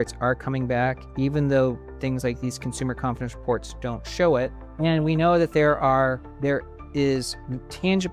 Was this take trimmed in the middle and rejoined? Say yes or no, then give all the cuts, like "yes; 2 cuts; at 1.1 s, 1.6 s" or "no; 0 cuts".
yes; 2 cuts; at 4.6 s, 6.3 s